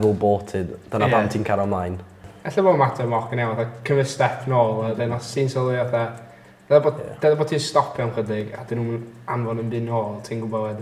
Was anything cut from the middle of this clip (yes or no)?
no